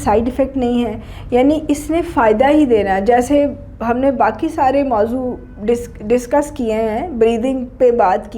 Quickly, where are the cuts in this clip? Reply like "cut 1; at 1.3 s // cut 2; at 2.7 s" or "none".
none